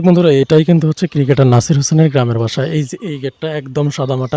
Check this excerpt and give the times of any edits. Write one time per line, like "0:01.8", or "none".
none